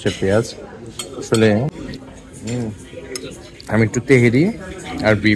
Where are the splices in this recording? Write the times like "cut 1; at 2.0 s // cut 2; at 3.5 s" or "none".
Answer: cut 1; at 1.8 s